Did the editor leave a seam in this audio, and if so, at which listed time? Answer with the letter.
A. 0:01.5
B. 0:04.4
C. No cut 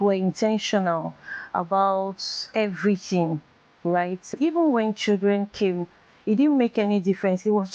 B